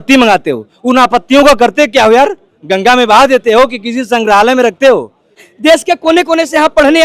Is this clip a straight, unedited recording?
no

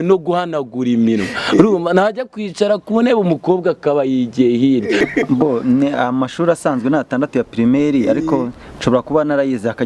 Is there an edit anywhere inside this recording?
yes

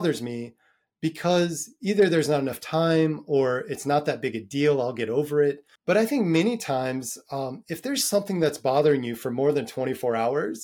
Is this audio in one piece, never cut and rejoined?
no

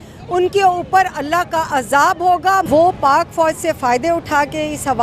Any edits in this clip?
yes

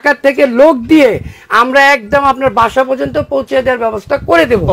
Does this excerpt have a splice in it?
no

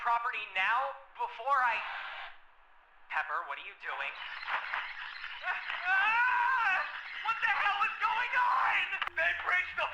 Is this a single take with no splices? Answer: no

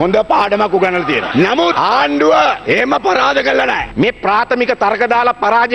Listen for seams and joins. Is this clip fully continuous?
no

